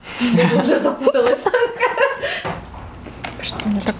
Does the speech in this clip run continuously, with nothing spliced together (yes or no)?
no